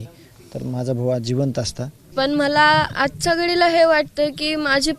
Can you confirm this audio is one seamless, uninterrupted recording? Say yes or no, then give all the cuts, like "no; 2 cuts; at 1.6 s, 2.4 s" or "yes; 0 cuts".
no; 1 cut; at 2.1 s